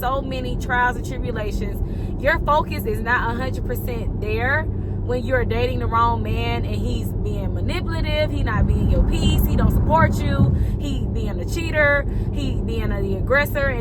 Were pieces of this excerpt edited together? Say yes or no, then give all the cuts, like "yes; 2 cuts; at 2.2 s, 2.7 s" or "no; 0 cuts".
no; 0 cuts